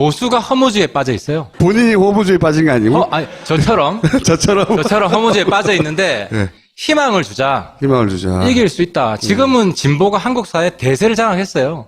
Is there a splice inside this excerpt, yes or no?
no